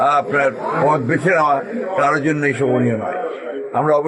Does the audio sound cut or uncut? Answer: uncut